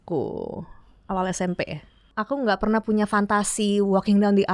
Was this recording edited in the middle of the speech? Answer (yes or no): yes